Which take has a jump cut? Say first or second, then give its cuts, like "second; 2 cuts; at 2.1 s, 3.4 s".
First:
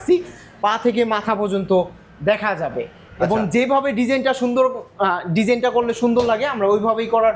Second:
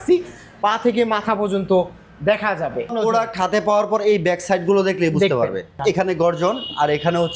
second; 2 cuts; at 2.9 s, 5.7 s